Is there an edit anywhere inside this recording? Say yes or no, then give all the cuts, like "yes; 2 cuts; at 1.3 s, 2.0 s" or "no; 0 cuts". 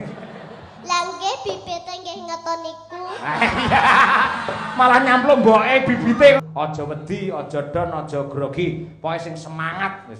yes; 1 cut; at 6.4 s